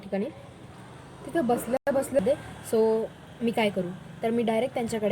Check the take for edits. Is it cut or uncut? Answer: cut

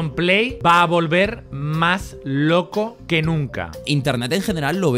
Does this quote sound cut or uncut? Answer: uncut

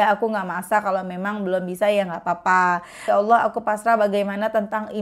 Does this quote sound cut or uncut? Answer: cut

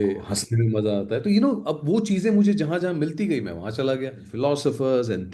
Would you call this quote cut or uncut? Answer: cut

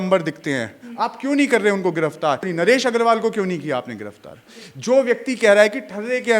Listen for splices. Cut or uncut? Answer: cut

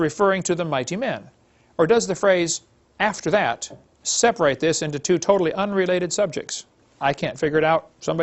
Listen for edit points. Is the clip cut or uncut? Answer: cut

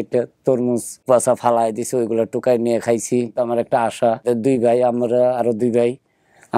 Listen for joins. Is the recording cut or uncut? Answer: cut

